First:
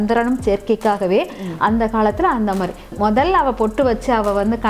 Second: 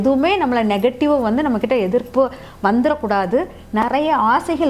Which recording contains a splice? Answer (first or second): first